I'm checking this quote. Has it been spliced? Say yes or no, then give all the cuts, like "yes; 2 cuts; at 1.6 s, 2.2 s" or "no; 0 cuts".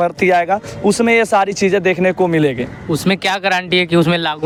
no; 0 cuts